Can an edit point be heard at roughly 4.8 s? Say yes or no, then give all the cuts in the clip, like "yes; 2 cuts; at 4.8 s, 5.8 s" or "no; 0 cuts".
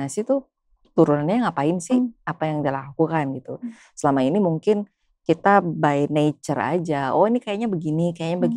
no; 0 cuts